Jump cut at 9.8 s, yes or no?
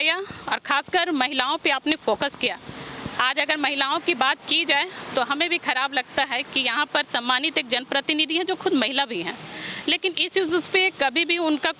no